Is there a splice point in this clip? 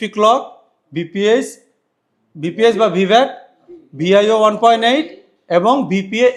no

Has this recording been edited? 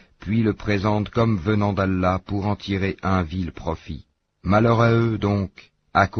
no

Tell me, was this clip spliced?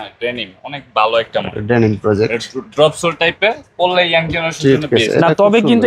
no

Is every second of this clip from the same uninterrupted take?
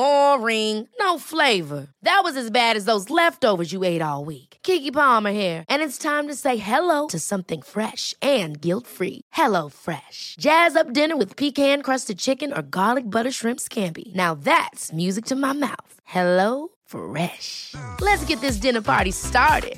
yes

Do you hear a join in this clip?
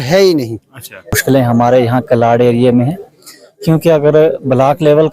yes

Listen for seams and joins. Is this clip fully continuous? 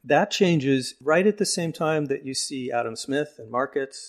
no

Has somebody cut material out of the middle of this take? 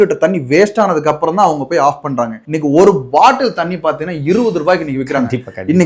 no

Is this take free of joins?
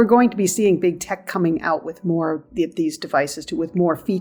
yes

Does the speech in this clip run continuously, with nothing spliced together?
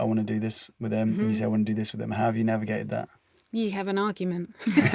yes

